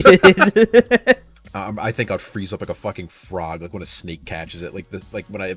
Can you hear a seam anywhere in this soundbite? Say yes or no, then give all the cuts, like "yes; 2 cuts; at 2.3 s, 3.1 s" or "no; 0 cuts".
yes; 1 cut; at 1.4 s